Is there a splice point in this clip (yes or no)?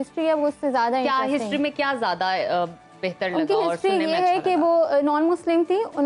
no